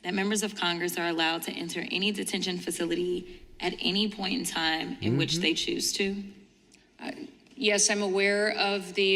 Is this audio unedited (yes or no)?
yes